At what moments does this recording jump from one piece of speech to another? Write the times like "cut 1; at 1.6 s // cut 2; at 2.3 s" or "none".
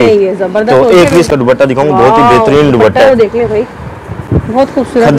cut 1; at 1.3 s